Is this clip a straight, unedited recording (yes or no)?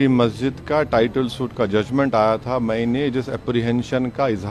yes